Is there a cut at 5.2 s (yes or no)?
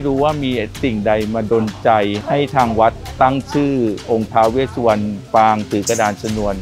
yes